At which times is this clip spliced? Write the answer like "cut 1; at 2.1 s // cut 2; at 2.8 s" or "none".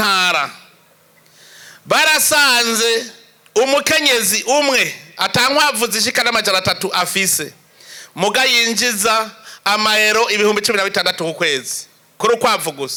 none

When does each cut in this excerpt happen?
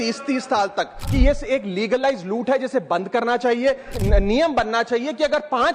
cut 1; at 1.0 s // cut 2; at 3.9 s

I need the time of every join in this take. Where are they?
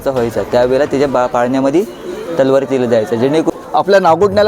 cut 1; at 3.5 s

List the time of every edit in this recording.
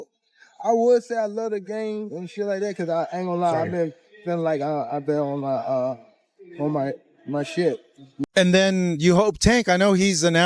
cut 1; at 8.1 s

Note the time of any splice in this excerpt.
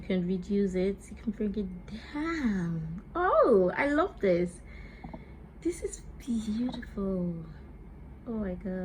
none

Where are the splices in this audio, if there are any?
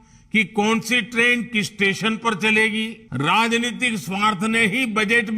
cut 1; at 3.0 s

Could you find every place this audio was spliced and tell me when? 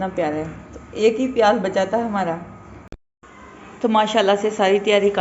cut 1; at 3.1 s

